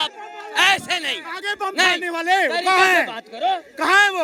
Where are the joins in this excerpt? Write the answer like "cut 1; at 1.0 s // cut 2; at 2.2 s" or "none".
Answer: none